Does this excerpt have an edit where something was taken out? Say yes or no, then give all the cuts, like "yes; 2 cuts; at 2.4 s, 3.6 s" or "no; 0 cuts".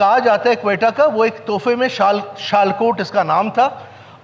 no; 0 cuts